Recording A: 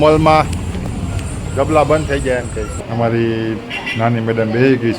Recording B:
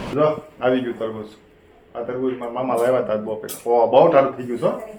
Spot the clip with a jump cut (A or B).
A